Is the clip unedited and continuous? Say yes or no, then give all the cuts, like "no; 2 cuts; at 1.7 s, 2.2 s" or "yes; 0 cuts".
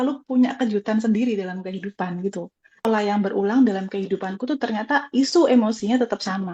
no; 1 cut; at 2.8 s